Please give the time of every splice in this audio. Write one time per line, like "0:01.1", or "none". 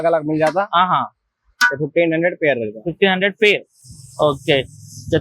none